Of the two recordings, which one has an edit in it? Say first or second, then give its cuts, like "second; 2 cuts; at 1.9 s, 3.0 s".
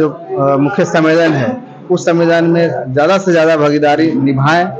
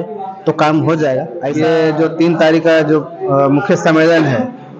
second; 1 cut; at 1.4 s